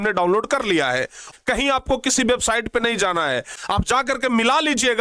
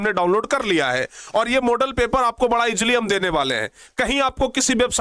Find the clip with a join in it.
first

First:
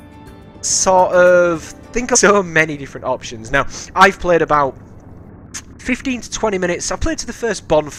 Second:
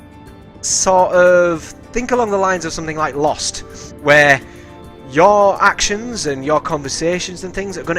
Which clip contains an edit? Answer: second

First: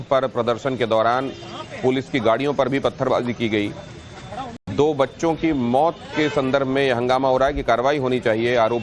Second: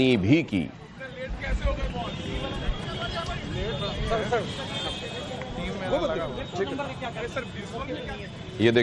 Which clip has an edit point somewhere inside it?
second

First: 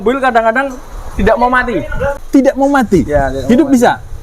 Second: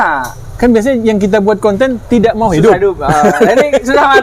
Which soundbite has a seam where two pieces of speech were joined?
first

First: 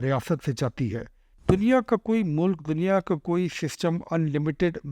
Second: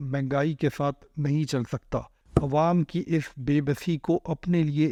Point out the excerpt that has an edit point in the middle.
first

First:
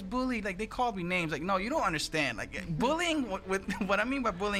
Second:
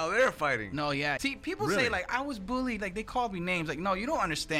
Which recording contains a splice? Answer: second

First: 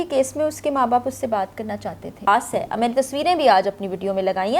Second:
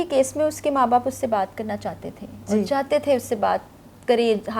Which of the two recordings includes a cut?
first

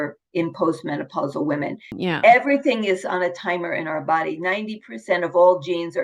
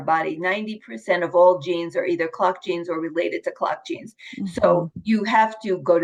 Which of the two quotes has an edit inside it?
first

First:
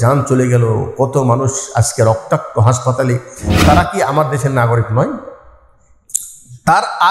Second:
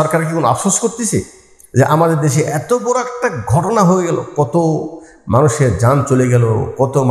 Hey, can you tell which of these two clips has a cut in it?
first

